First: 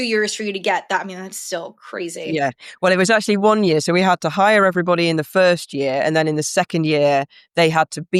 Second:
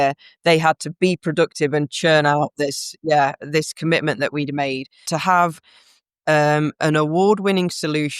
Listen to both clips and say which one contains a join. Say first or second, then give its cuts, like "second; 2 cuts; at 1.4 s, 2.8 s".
second; 1 cut; at 5.1 s